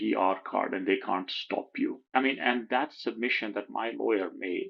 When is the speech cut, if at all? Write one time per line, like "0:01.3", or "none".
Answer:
0:02.0